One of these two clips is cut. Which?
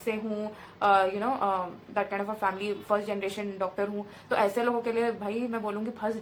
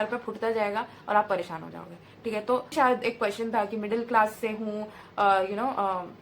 second; 1 cut; at 2.7 s

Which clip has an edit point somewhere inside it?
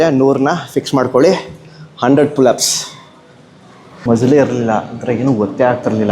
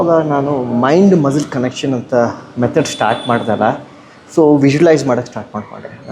first; 1 cut; at 4.0 s

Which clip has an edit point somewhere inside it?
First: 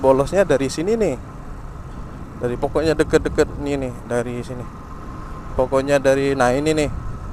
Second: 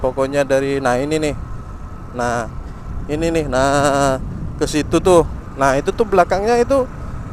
second; 1 cut; at 5.4 s

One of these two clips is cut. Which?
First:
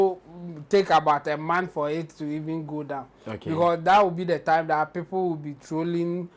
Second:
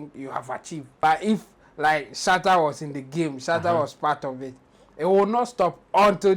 second; 1 cut; at 0.9 s

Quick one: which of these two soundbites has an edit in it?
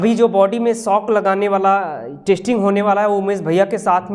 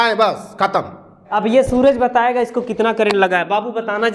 second; 1 cut; at 1.2 s

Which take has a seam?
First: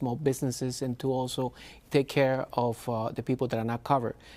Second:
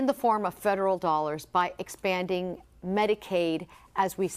second; 1 cut; at 3.4 s

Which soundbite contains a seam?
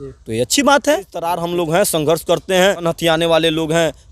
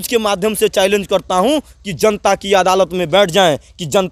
first; 2 cuts; at 1.4 s, 2.8 s

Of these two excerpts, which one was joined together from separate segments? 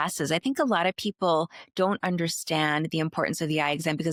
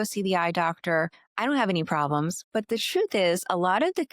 second; 2 cuts; at 1.2 s, 2.4 s

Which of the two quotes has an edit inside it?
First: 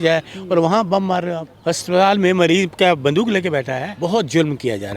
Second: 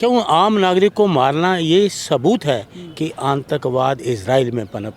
first; 2 cuts; at 1.4 s, 3.9 s

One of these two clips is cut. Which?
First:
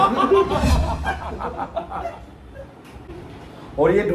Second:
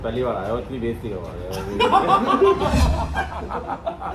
first; 1 cut; at 3.1 s

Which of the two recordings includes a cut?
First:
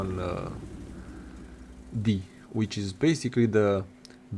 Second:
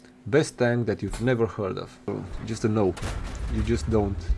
second; 1 cut; at 2.1 s

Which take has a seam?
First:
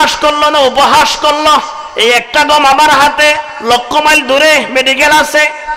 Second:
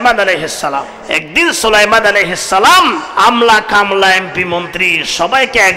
second; 2 cuts; at 1.0 s, 3.0 s

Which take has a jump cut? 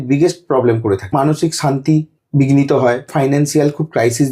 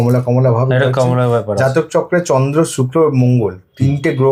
first; 3 cuts; at 1.1 s, 2.2 s, 3.1 s

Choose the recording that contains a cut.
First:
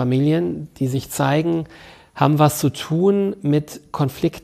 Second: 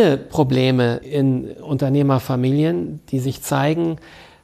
second; 1 cut; at 1.0 s

